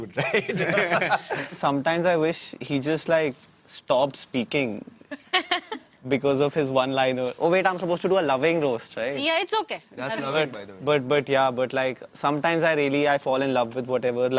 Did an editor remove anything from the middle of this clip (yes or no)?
yes